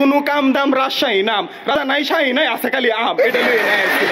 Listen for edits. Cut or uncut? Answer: cut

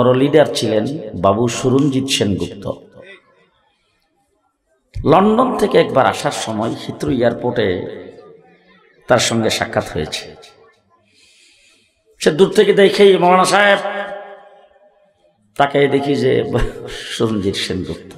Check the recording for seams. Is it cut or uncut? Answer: uncut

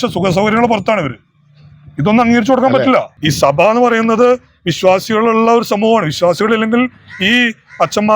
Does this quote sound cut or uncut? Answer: cut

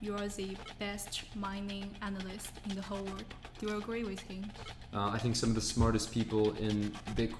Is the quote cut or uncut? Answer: cut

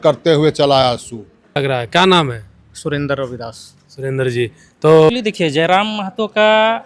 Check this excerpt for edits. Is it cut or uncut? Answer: cut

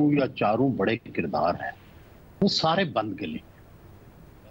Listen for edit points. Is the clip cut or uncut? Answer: uncut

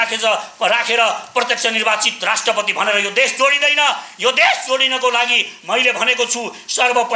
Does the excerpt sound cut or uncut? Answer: uncut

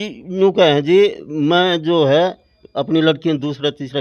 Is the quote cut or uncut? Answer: uncut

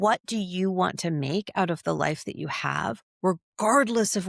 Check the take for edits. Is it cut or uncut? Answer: uncut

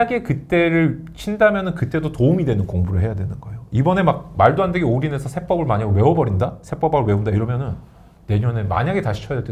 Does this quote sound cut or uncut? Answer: uncut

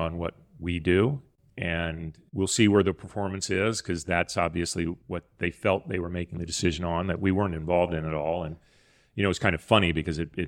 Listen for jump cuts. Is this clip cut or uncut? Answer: cut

